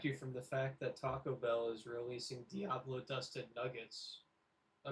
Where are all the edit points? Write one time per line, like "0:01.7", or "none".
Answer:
none

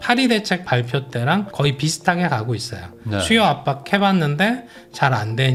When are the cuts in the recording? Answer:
none

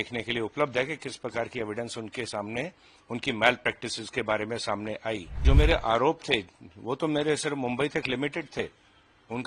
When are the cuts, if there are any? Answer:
0:05.4

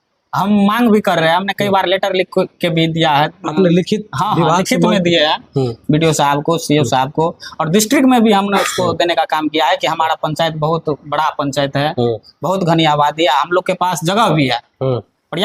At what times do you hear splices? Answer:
none

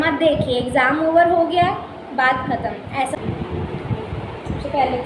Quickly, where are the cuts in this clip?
0:03.1

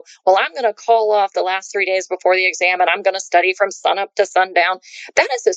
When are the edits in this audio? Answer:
none

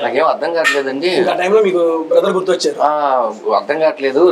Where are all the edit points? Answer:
none

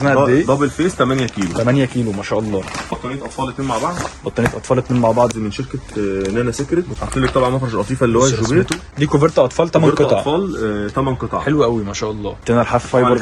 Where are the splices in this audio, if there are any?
0:03.0
0:07.0
0:08.9
0:12.4

